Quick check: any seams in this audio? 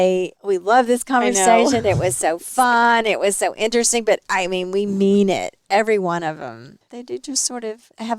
no; 0 cuts

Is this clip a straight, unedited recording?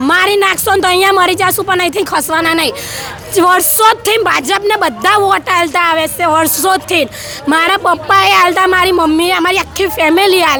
yes; 0 cuts

